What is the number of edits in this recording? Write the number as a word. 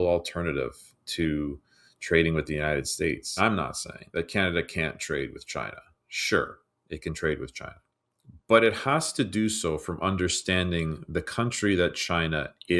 one